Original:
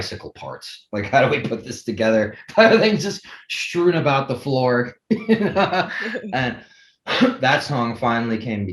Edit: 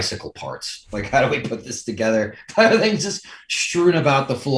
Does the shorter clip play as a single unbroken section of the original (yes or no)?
yes